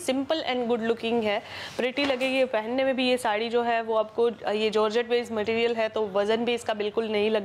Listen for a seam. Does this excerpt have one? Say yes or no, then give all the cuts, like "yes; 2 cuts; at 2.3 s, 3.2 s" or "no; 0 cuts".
no; 0 cuts